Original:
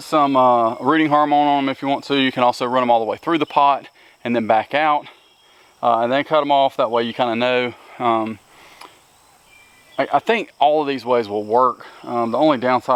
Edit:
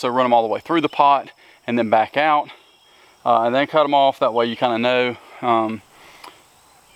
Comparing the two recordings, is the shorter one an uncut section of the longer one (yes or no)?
yes